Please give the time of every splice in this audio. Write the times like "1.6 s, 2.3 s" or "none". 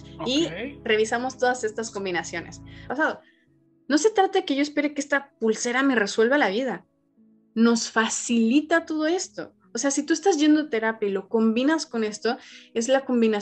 2.8 s